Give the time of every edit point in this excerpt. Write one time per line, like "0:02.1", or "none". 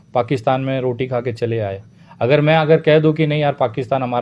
none